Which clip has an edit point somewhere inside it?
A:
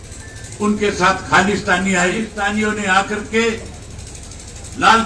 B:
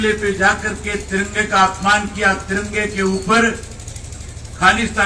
A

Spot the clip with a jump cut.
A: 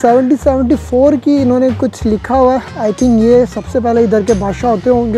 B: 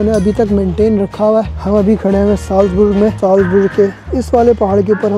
B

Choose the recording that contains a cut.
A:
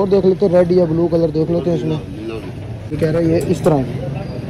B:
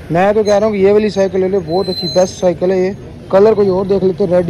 A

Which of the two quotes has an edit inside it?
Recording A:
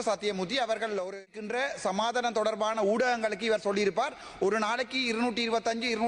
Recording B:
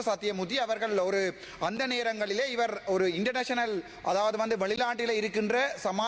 A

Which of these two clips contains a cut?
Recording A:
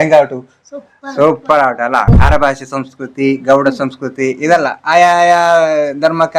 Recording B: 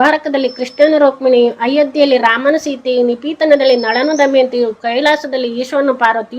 A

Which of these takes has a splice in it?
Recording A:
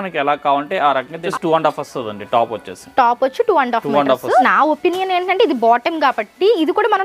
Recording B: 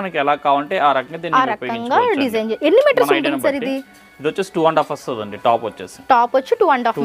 A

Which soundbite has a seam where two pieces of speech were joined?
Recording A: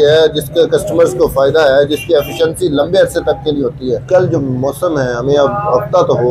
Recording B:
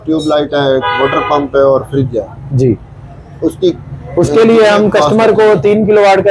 A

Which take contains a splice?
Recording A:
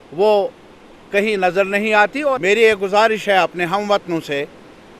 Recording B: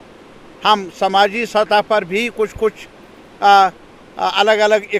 A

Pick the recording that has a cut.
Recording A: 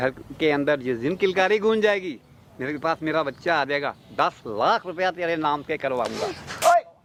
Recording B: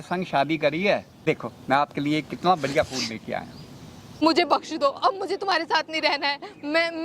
B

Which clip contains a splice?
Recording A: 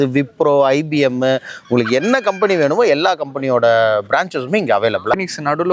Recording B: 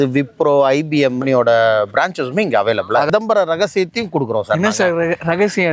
B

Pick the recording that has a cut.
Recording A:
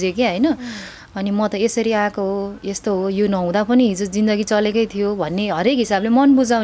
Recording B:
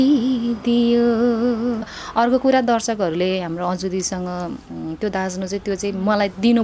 B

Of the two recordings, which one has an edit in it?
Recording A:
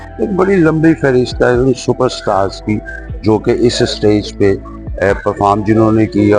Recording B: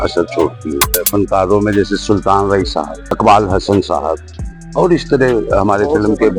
B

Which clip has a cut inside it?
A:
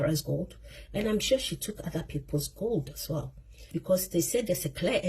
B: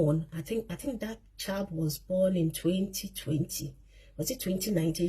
A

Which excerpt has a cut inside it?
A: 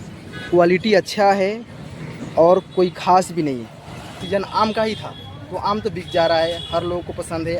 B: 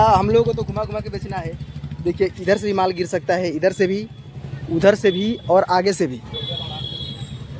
A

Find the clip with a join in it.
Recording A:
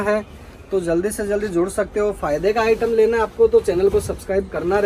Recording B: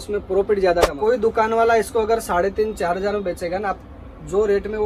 B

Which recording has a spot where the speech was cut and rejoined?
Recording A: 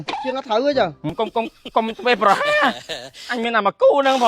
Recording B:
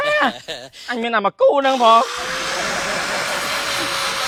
A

